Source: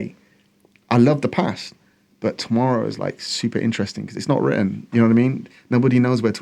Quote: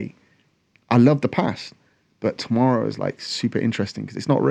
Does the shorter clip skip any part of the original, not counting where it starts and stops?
no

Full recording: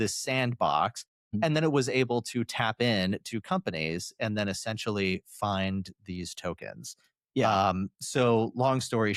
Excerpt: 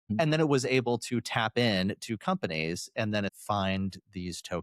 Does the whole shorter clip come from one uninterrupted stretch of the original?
no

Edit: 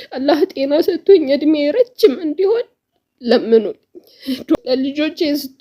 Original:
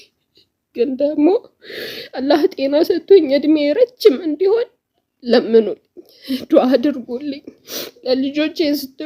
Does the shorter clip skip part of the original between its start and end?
yes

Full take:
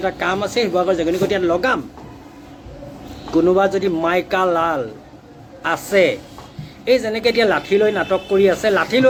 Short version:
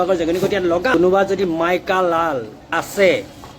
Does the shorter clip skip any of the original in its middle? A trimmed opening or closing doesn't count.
yes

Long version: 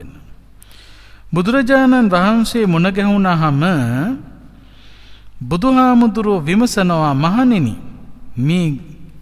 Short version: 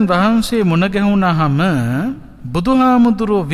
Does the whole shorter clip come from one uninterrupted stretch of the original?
no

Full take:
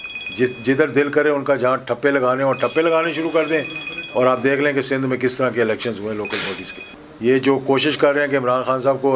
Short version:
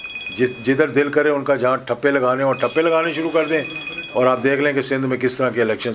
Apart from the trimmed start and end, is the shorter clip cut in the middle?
no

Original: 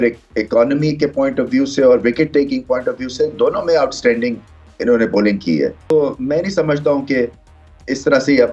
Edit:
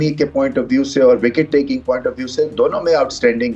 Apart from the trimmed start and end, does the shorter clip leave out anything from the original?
no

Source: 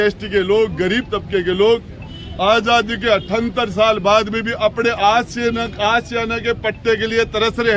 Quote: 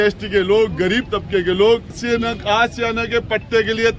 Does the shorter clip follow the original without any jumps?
no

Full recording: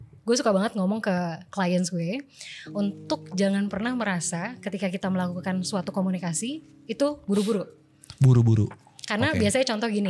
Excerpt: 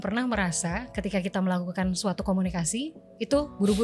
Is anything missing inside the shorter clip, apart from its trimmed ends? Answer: no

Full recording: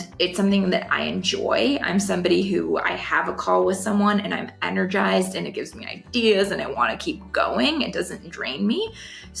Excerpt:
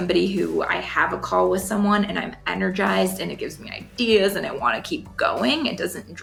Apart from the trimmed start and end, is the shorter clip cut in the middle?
no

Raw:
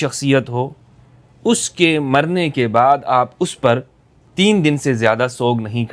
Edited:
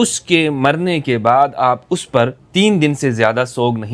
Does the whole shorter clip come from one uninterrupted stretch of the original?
no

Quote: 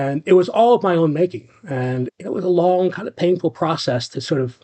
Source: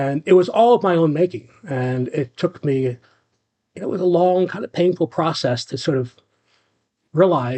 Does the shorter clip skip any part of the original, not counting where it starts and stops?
yes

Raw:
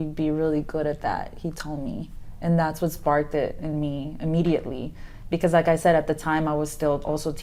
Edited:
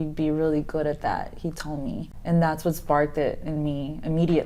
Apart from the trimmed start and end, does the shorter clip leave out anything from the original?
yes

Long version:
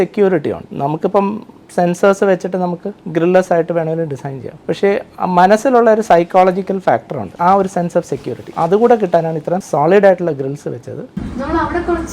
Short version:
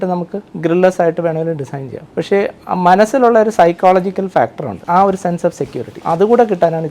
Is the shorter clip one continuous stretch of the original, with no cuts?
yes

